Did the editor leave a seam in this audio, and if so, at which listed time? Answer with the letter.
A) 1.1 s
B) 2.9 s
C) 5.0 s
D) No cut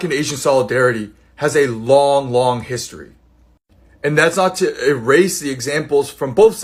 D